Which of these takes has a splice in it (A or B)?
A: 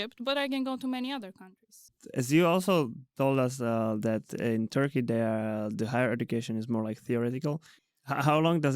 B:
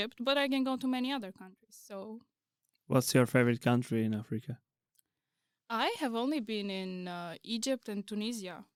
A